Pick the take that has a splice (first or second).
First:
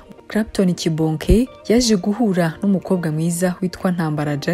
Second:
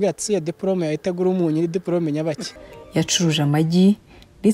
second